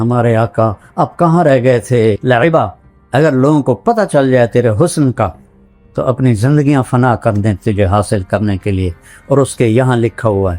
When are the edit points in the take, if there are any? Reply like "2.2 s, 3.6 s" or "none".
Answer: 2.2 s